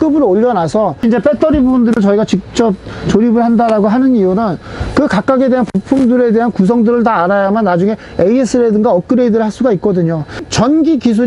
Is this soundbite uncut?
no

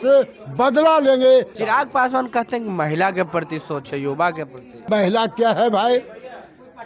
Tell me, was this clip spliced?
yes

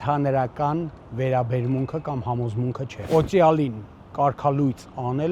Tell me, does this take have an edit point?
yes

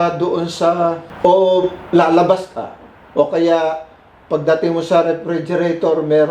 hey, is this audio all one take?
no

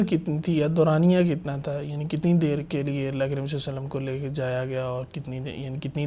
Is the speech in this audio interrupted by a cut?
no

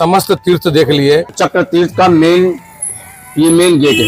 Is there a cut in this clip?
yes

